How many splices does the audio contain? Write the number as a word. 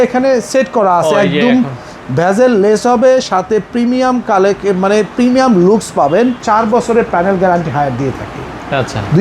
one